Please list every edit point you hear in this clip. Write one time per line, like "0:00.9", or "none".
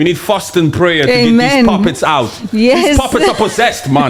none